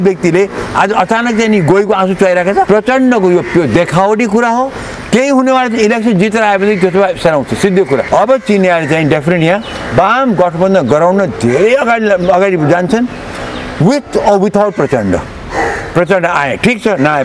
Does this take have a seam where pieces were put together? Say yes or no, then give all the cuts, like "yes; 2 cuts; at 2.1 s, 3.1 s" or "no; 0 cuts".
yes; 2 cuts; at 2.7 s, 8.1 s